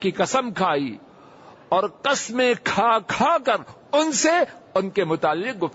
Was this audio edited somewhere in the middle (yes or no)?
no